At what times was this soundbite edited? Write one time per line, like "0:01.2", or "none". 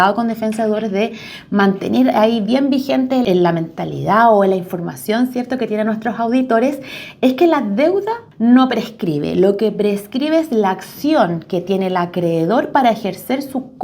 0:03.2
0:08.2